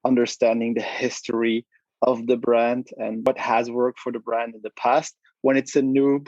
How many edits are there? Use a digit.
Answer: 1